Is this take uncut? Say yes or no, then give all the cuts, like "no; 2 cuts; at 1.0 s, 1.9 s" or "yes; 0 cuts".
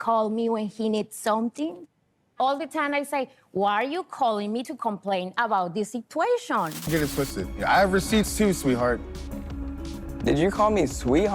no; 1 cut; at 6.8 s